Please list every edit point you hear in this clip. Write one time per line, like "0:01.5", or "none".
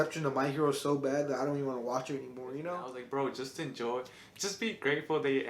0:02.9